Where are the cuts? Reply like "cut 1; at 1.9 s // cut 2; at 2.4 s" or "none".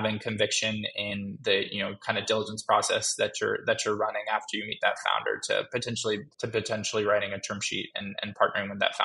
cut 1; at 6.3 s